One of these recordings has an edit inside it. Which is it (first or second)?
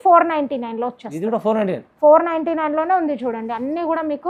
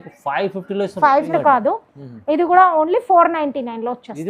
second